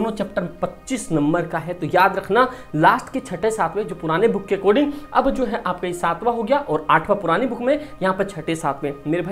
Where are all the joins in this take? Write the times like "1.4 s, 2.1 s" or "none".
none